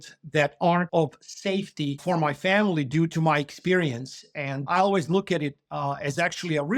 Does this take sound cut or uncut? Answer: cut